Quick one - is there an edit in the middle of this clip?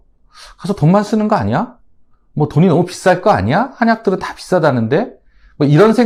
no; 0 cuts

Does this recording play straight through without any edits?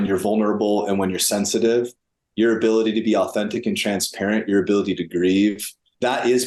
yes; 0 cuts

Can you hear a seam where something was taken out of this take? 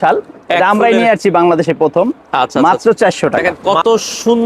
yes; 1 cut; at 3.5 s

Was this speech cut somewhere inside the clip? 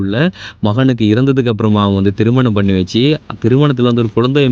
no; 0 cuts

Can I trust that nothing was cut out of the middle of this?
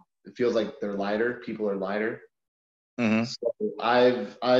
yes; 0 cuts

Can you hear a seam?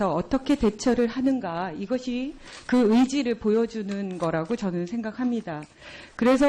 no; 0 cuts

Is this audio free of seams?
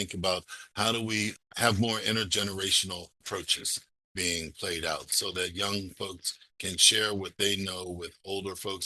yes; 0 cuts

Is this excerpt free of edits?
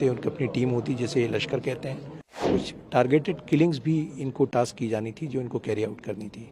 no; 1 cut; at 2.5 s

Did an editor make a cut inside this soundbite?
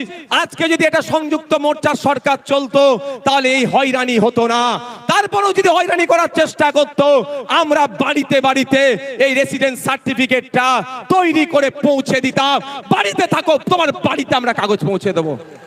no; 0 cuts

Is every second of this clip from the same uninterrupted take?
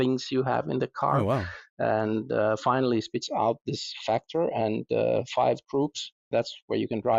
yes; 0 cuts

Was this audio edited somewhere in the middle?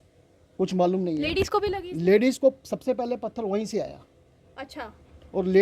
no; 0 cuts

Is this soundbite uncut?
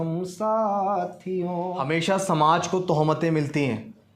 no; 1 cut; at 1.8 s

